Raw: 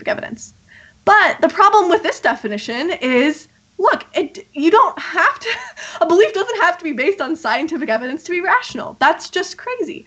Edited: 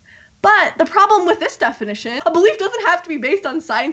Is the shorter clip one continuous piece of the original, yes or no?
no